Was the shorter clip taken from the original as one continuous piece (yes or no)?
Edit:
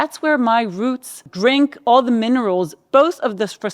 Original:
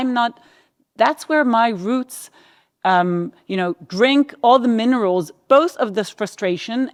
no